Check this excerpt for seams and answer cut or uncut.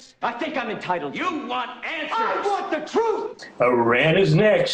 uncut